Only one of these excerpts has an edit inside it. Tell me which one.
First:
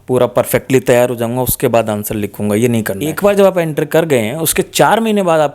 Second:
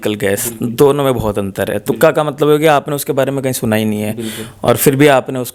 first; 1 cut; at 3.1 s

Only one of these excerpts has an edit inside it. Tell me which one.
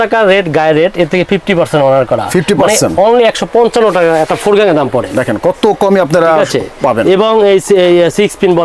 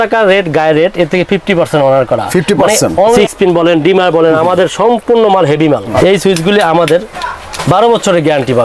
second; 2 cuts; at 3.2 s, 5.9 s

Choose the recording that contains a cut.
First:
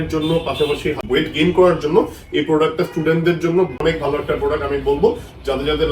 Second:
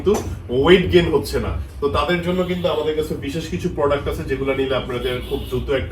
first; 2 cuts; at 1.0 s, 3.7 s

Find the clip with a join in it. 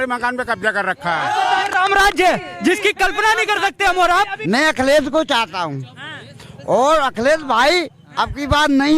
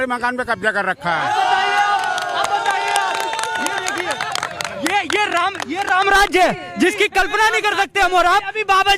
first; 2 cuts; at 1.7 s, 4.4 s

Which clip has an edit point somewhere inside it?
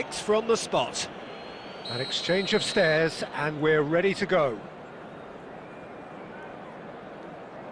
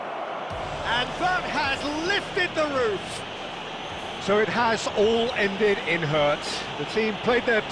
first; 1 cut; at 1.2 s

